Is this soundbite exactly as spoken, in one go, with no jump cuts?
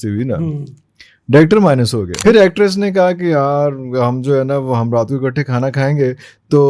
no; 1 cut; at 2.1 s

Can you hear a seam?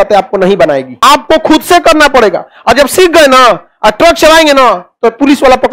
yes; 1 cut; at 1.0 s

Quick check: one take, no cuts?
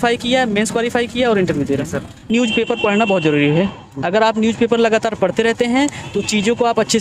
no; 1 cut; at 2.3 s

